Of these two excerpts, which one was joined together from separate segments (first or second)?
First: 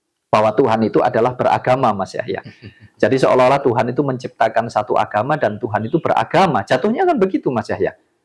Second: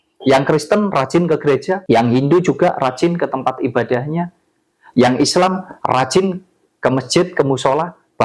second